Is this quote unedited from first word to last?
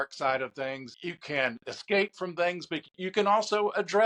no; 1 cut; at 0.9 s

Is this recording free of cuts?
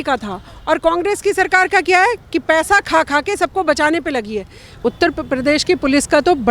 no; 1 cut; at 4.8 s

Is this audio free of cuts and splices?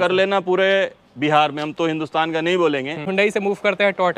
no; 1 cut; at 3.1 s

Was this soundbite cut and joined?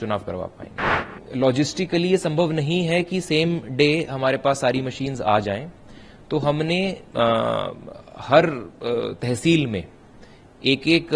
yes; 1 cut; at 1.1 s

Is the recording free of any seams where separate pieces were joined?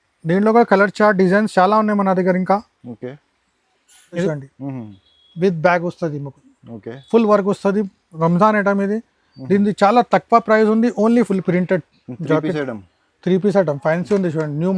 no; 2 cuts; at 4.2 s, 11.3 s

